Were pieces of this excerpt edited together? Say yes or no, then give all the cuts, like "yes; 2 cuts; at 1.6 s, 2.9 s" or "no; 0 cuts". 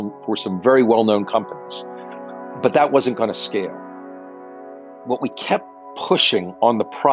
no; 0 cuts